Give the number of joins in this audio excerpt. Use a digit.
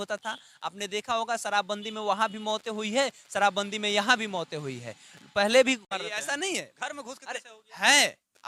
1